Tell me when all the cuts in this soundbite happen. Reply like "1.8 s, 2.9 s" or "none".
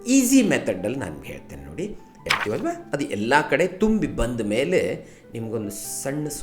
2.2 s